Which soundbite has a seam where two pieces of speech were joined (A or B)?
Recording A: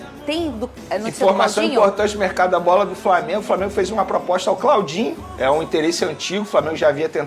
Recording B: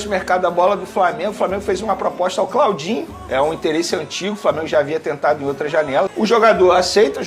B